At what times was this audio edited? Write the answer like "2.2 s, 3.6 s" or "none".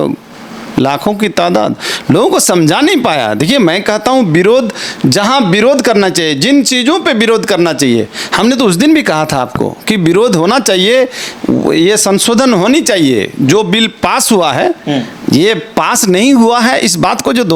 none